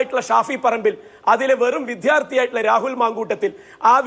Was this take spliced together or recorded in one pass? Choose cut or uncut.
uncut